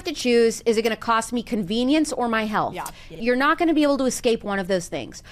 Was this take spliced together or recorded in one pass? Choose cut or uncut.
cut